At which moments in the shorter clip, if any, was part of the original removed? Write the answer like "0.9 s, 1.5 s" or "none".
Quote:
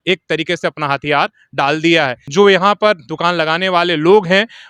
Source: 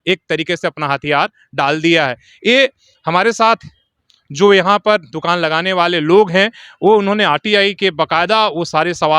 2.2 s